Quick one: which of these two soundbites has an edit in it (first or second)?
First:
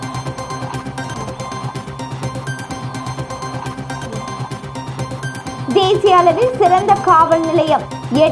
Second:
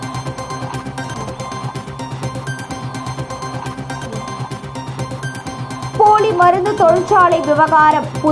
second